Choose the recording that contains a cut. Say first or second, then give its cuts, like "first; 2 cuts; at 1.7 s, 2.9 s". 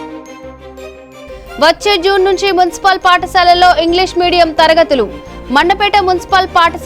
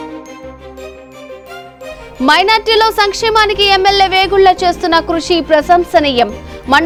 first; 1 cut; at 1.4 s